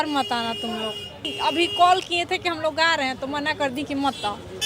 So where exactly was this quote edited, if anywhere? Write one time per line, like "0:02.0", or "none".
0:01.3